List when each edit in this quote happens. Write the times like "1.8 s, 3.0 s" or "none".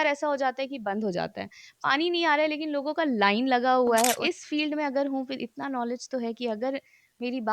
4.2 s